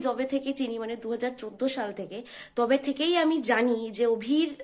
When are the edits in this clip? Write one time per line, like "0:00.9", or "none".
none